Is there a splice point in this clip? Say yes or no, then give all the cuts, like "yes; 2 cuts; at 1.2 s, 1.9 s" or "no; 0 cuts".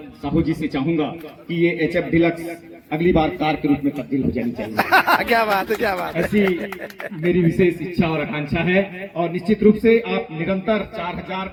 no; 0 cuts